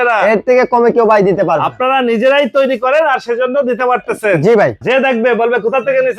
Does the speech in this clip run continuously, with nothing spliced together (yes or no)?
no